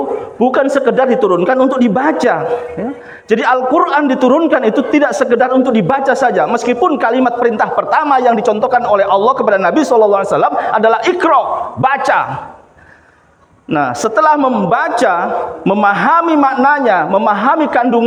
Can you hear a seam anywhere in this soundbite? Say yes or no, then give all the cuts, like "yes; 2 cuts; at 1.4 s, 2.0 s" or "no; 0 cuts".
no; 0 cuts